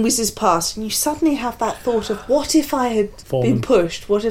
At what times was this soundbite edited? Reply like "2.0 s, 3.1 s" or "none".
3.2 s